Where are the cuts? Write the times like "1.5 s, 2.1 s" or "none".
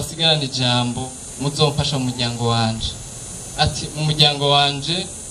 none